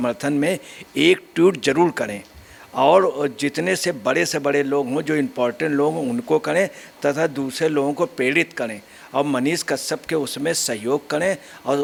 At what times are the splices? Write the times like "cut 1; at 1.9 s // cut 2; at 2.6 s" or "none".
none